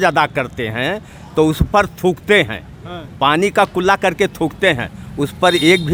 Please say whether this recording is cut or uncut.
uncut